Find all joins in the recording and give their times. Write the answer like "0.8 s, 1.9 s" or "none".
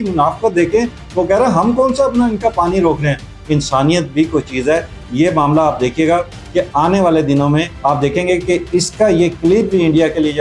3.3 s, 7.7 s